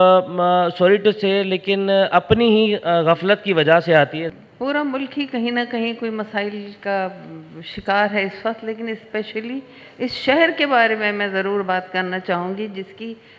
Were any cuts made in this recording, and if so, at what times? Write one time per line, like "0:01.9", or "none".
none